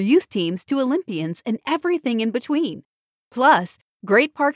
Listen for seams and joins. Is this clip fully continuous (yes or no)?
yes